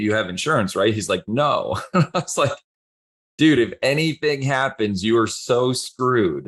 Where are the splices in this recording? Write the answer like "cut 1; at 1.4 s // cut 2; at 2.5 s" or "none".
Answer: none